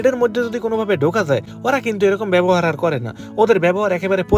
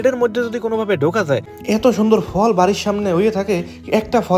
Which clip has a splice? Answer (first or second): second